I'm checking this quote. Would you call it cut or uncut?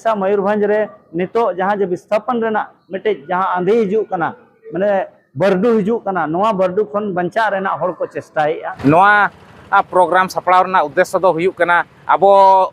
cut